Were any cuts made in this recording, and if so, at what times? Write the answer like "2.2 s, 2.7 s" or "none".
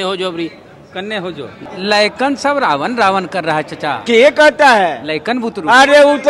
1.6 s